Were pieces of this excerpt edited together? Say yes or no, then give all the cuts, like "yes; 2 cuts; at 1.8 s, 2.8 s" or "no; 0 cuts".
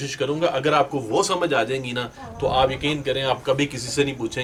no; 0 cuts